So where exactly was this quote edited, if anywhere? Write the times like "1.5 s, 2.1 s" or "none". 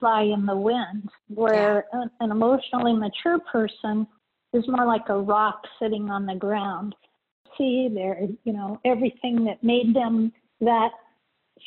7.4 s